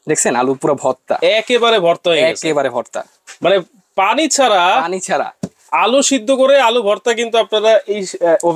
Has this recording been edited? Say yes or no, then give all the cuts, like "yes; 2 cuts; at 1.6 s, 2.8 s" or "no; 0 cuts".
no; 0 cuts